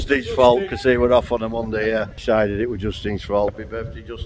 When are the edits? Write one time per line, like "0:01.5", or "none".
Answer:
0:02.1
0:03.5